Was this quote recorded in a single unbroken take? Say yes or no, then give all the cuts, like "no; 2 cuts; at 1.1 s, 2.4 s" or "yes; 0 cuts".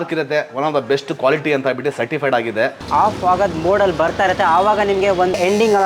no; 1 cut; at 2.8 s